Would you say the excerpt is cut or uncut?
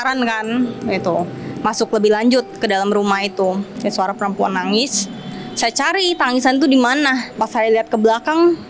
cut